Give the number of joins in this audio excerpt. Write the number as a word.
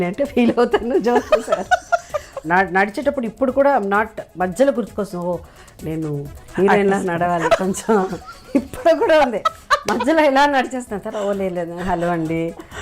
one